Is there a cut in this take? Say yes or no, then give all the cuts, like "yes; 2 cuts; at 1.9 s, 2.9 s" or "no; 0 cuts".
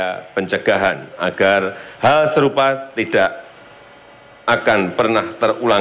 no; 0 cuts